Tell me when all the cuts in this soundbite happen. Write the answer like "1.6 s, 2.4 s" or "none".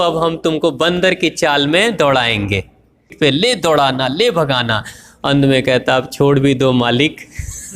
3.1 s